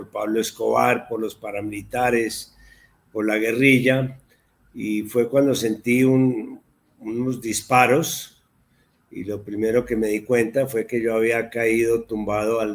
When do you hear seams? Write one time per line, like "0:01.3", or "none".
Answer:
none